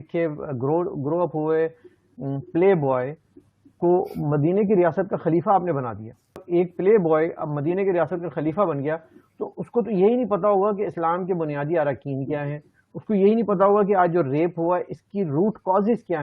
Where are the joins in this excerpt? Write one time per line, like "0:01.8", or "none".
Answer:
0:06.4